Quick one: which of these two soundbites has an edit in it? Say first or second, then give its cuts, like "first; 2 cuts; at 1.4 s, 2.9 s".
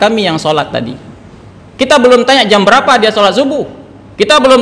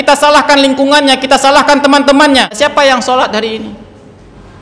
second; 1 cut; at 2.6 s